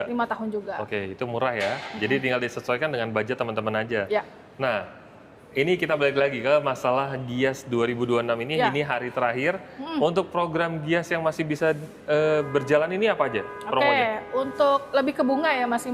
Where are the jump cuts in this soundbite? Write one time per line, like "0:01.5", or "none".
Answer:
none